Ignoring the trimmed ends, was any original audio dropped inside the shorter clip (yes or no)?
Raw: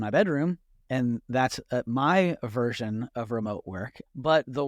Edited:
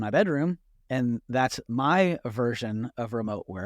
yes